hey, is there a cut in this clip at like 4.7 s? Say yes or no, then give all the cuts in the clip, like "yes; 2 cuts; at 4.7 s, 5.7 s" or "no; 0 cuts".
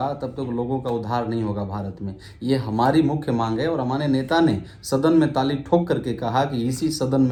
no; 0 cuts